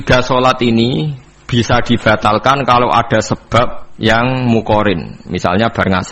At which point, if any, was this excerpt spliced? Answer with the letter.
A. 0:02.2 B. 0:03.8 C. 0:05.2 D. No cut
B